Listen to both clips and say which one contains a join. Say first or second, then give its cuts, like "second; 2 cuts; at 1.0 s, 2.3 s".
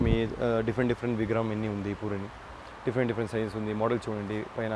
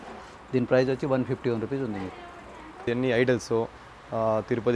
second; 1 cut; at 2.8 s